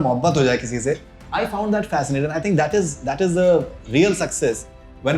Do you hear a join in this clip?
yes; 1 cut; at 1.1 s

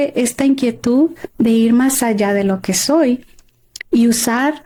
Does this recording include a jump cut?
no; 0 cuts

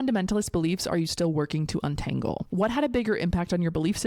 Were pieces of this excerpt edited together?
yes; 1 cut; at 2.5 s

